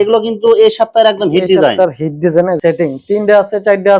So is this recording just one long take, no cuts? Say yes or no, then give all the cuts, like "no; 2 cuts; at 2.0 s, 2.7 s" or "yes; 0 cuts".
no; 1 cut; at 2.6 s